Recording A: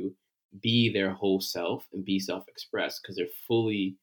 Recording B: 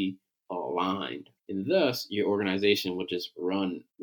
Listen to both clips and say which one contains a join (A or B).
B